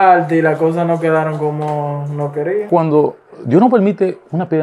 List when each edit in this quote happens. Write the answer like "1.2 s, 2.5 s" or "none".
2.7 s